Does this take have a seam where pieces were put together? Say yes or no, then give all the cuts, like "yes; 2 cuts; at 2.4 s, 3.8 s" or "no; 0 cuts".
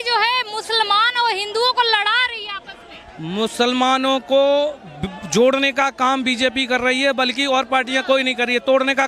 no; 0 cuts